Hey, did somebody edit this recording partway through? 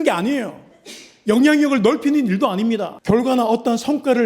yes; 1 cut; at 2.9 s

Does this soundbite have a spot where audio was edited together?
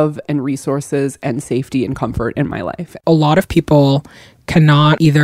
yes; 1 cut; at 3.0 s

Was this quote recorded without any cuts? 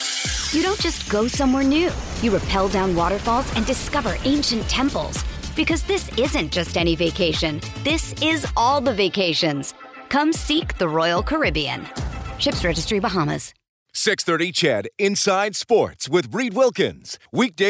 no; 1 cut; at 13.6 s

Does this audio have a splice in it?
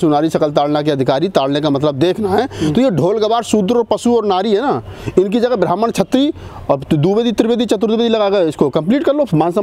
no; 0 cuts

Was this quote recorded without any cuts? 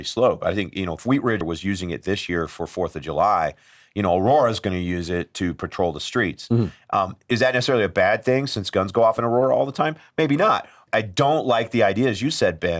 no; 2 cuts; at 1.4 s, 10.8 s

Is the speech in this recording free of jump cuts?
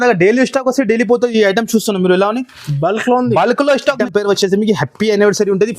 no; 1 cut; at 4.0 s

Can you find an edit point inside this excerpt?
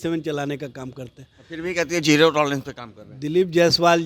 no; 0 cuts

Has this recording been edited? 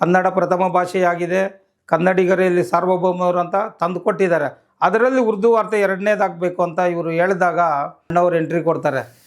yes; 1 cut; at 8.1 s

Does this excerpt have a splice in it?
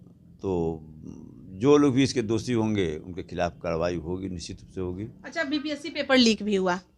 no; 0 cuts

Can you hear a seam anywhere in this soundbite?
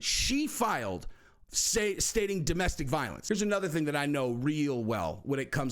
yes; 1 cut; at 3.1 s

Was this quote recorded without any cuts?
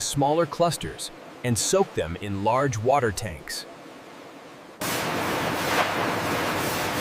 no; 1 cut; at 4.8 s

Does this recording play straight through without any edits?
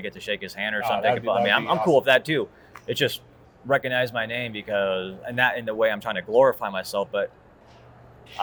yes; 0 cuts

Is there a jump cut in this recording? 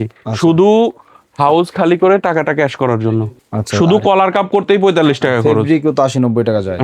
yes; 1 cut; at 3.4 s

